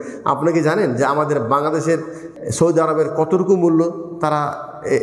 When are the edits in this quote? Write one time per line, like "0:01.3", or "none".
0:02.2